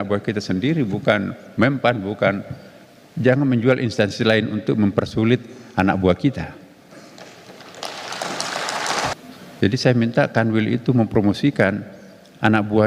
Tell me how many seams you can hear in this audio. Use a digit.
1